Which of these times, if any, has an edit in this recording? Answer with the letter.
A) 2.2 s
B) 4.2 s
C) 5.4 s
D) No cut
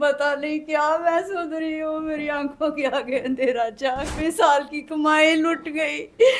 B